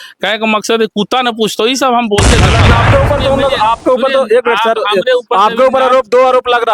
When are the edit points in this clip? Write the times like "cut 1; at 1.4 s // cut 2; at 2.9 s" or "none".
cut 1; at 2.7 s